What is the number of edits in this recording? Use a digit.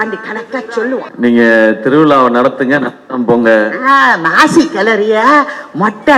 1